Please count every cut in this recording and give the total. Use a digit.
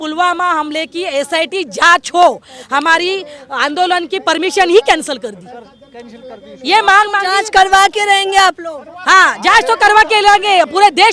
0